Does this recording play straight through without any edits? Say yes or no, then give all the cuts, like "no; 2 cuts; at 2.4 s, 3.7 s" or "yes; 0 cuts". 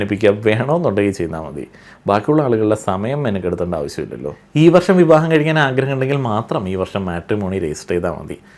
yes; 0 cuts